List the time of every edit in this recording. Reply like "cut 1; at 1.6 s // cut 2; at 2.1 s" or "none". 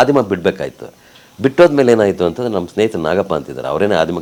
none